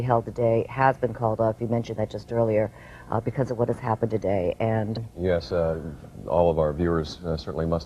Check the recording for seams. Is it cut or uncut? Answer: uncut